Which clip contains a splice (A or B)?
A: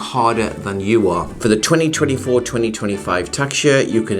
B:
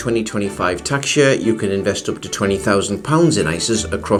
A